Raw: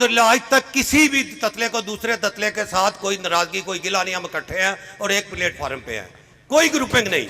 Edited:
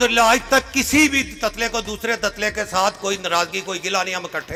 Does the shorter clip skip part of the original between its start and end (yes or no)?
no